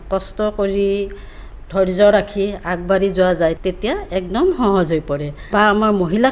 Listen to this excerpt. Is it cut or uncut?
cut